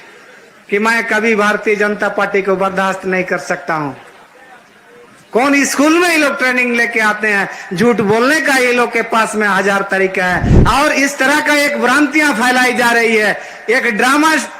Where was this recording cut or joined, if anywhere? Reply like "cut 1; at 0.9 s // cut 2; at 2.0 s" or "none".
cut 1; at 10.5 s